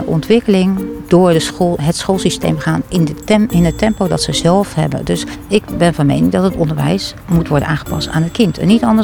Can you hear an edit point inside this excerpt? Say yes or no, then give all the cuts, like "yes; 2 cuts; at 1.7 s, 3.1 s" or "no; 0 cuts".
yes; 2 cuts; at 1.0 s, 5.3 s